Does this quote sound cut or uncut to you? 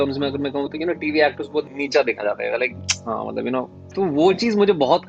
cut